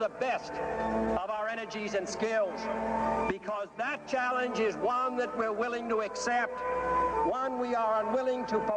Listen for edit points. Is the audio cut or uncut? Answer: cut